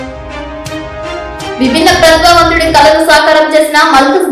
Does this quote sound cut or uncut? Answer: cut